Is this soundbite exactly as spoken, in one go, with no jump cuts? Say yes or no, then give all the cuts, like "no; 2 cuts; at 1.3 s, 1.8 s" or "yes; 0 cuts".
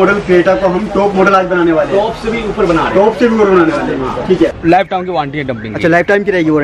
no; 1 cut; at 4.6 s